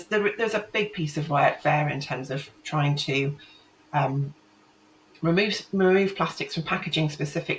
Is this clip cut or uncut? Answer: uncut